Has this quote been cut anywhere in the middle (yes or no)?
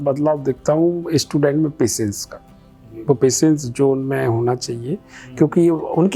no